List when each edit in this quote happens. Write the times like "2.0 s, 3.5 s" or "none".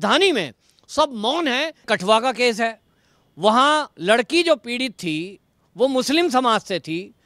1.9 s